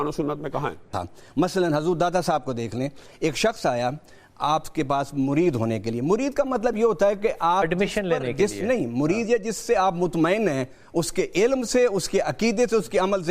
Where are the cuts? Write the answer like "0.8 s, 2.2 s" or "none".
0.9 s